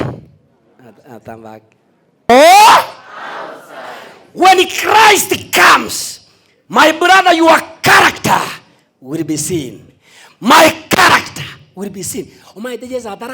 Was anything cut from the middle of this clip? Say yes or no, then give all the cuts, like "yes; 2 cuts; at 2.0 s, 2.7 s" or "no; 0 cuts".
yes; 1 cut; at 2.1 s